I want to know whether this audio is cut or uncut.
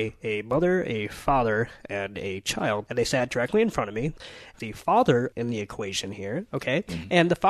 cut